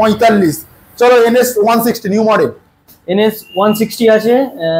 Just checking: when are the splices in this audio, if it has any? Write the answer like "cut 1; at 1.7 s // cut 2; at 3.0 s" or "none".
none